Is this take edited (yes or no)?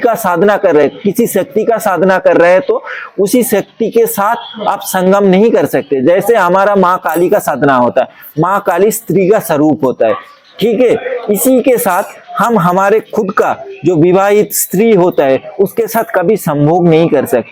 no